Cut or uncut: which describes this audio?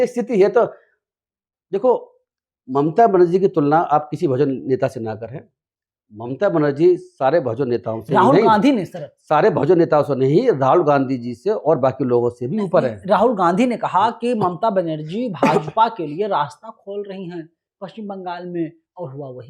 uncut